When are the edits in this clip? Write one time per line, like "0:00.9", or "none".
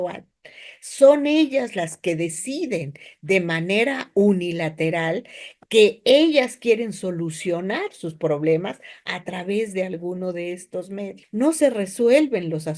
0:11.2

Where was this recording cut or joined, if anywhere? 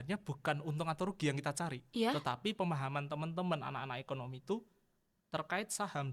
none

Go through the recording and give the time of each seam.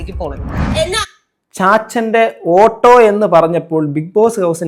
none

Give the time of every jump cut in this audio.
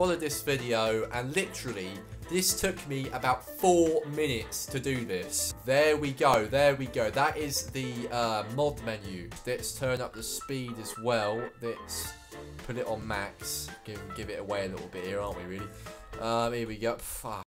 0:05.4
0:09.2

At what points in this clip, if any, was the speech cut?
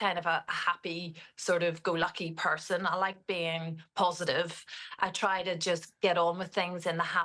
none

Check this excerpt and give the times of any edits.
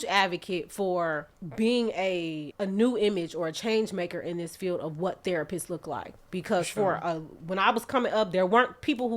0:01.4
0:02.4

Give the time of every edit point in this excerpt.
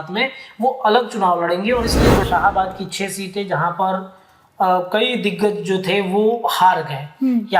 0:02.2

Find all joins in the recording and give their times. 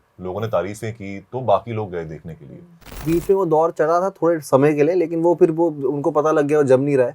0:03.0

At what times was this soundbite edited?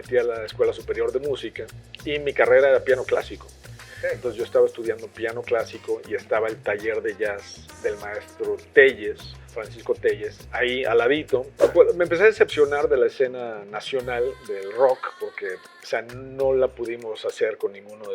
0:11.7

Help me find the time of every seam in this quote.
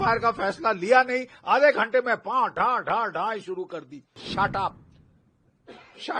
0:04.2

